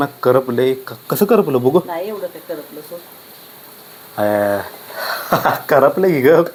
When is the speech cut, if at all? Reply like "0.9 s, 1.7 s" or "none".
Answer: none